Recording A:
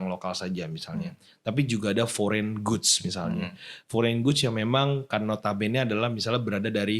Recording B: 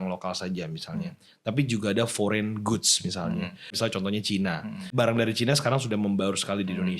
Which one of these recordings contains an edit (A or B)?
B